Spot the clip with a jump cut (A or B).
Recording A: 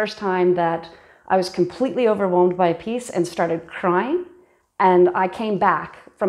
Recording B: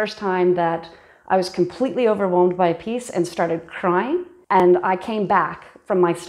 B